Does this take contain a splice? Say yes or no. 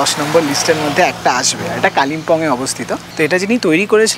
no